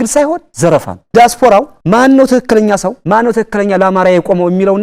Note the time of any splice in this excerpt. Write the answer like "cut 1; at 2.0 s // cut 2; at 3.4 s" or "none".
cut 1; at 1.0 s